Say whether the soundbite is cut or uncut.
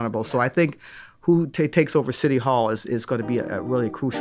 uncut